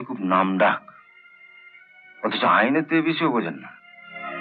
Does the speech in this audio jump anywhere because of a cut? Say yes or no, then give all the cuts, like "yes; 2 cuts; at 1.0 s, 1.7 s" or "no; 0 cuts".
no; 0 cuts